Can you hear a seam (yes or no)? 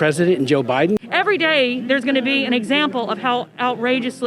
yes